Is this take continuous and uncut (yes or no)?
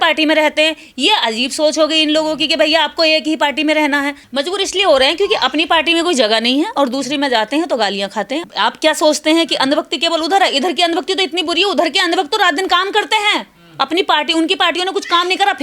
no